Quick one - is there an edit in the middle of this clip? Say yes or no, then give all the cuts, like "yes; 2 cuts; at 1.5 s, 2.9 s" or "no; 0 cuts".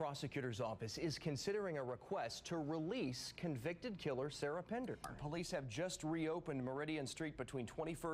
yes; 1 cut; at 5.1 s